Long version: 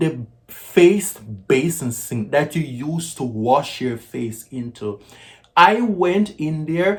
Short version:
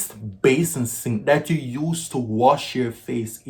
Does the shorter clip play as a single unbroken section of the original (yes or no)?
yes